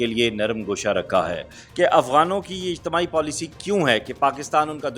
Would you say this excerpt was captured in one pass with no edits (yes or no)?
no